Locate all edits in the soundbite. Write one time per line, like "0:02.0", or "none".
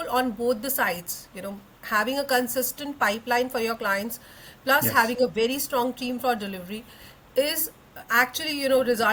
none